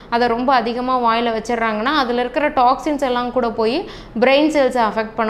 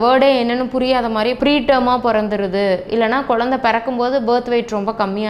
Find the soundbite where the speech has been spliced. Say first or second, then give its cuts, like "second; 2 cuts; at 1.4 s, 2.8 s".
second; 1 cut; at 1.4 s